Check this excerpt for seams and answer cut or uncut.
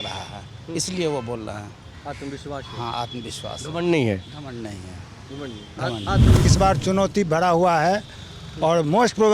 cut